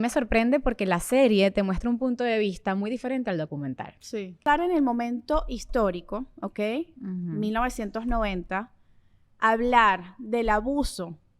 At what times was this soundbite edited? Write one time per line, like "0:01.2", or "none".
0:04.4

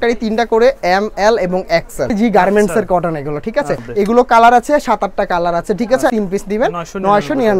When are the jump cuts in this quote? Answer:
0:02.1
0:03.8
0:06.1

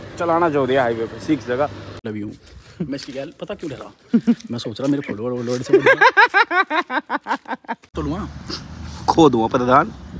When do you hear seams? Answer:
0:02.0
0:07.9

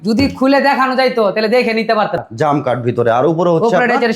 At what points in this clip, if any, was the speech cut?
0:02.3

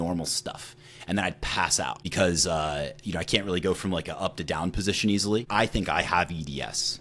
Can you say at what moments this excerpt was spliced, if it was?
0:02.0
0:05.5

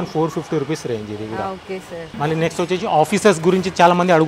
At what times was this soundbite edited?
0:02.1

